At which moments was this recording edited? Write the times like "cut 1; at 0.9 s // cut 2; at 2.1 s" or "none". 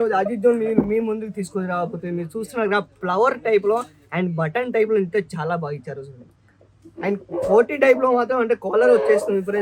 none

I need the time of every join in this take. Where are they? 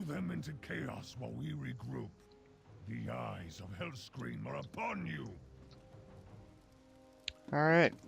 cut 1; at 2.6 s

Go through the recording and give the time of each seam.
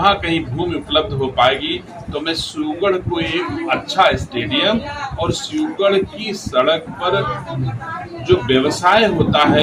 none

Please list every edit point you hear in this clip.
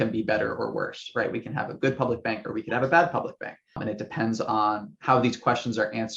cut 1; at 3.8 s

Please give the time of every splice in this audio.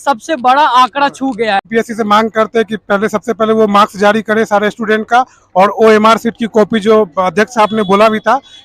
cut 1; at 1.7 s

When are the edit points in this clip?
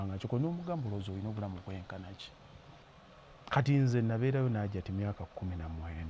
cut 1; at 2.8 s

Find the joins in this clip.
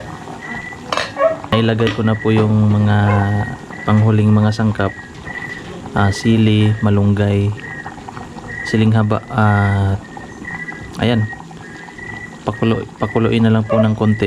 cut 1; at 1.5 s

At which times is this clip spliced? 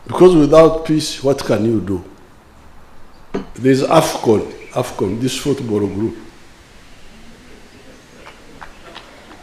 cut 1; at 3.5 s

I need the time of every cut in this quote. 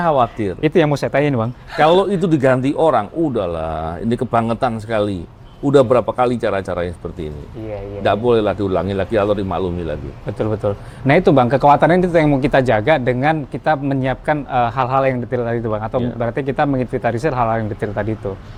none

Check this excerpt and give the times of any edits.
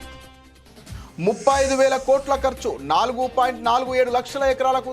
none

